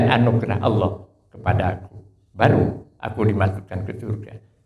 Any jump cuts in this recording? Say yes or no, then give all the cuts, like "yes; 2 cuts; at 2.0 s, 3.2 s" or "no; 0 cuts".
no; 0 cuts